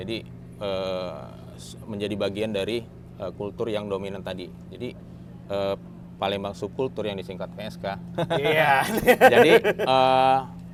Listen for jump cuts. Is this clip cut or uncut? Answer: uncut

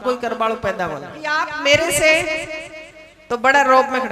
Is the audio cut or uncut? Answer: cut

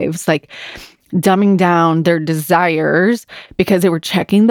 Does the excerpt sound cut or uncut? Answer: uncut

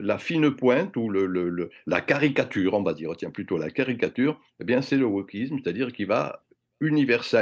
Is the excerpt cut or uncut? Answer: uncut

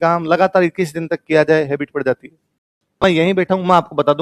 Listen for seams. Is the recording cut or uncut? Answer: cut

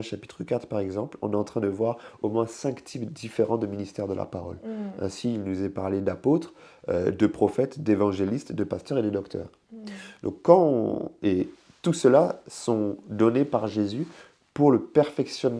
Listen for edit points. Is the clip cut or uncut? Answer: uncut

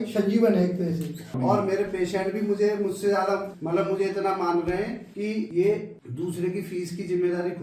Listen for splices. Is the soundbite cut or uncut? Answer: cut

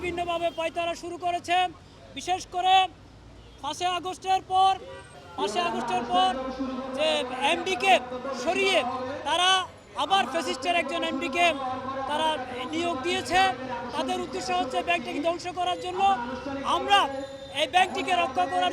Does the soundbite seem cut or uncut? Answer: uncut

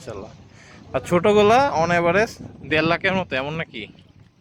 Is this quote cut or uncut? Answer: uncut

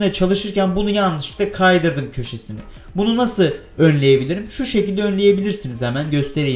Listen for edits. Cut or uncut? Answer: uncut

